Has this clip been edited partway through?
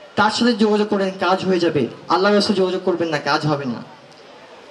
no; 0 cuts

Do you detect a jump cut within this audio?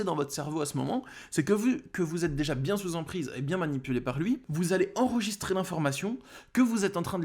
no; 0 cuts

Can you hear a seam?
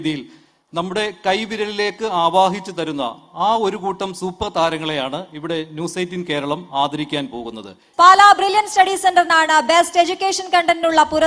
yes; 1 cut; at 8.0 s

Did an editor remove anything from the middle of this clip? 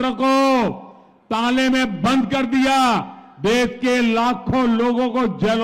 no; 0 cuts

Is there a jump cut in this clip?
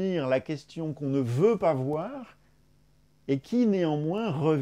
no; 0 cuts

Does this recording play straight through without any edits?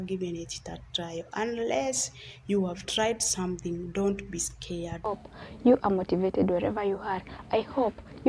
no; 1 cut; at 5.1 s

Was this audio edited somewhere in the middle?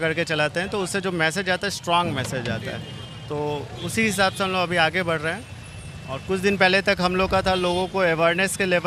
no; 0 cuts

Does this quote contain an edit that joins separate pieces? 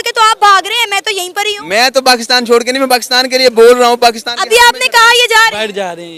no; 0 cuts

